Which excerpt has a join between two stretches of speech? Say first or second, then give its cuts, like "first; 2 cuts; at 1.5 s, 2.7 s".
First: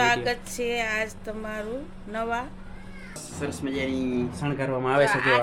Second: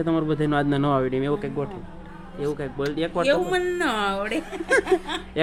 first; 1 cut; at 3.3 s